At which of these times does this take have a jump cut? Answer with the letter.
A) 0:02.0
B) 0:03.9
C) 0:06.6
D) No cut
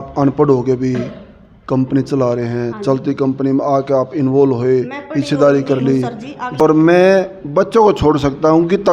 C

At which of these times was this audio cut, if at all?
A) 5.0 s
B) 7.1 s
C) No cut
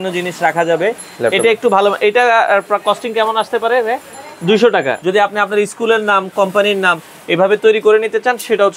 A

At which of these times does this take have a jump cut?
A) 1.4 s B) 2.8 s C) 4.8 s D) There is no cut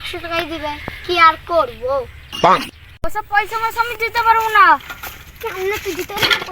B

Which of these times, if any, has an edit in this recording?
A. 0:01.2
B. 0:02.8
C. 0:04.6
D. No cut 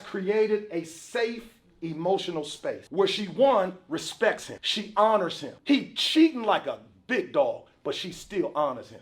B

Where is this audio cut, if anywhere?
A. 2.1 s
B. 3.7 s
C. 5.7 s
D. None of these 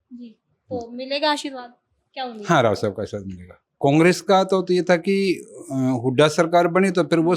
B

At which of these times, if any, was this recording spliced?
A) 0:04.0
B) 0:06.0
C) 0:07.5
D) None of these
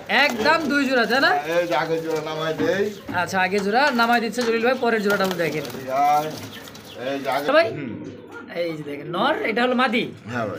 C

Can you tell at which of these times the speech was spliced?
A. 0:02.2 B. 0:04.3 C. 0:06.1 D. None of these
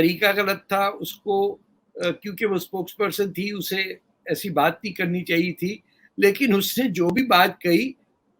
D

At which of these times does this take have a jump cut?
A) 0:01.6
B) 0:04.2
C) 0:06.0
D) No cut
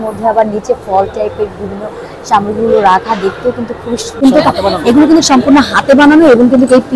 B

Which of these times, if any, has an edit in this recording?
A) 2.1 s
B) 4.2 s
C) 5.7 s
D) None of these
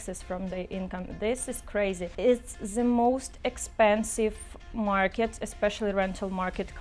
A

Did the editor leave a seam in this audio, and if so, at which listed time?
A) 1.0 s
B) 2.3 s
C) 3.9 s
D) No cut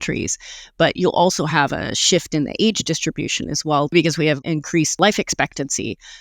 C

